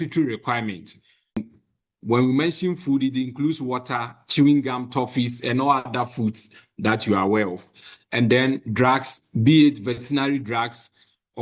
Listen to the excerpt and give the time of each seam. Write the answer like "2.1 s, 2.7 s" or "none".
1.4 s